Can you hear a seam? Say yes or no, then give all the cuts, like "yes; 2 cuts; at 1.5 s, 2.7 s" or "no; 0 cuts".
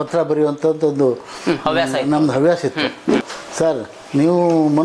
yes; 1 cut; at 3.4 s